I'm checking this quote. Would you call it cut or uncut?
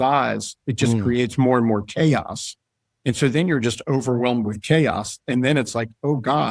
uncut